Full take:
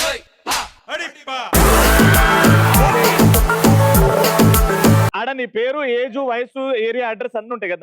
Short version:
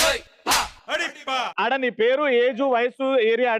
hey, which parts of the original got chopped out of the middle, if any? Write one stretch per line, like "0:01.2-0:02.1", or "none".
0:01.5-0:05.1